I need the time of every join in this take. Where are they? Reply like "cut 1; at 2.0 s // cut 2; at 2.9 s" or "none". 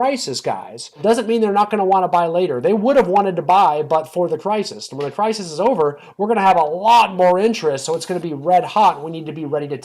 cut 1; at 1.0 s

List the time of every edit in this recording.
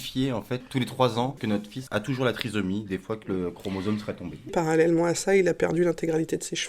cut 1; at 1.5 s // cut 2; at 4.5 s

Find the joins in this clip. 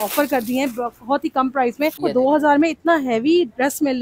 cut 1; at 1.9 s

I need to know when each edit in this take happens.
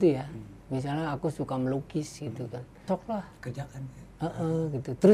cut 1; at 2.8 s

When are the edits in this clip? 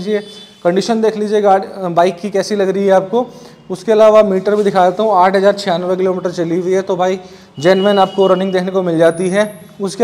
none

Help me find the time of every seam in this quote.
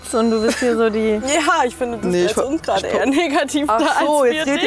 none

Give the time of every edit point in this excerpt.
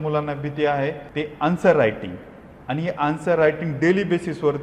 cut 1; at 1.0 s

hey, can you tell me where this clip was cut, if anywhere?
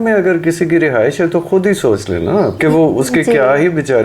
cut 1; at 2.5 s

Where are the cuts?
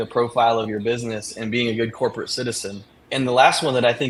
none

